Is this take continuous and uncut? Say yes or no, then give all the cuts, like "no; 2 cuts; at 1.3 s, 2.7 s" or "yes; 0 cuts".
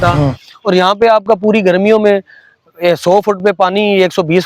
yes; 0 cuts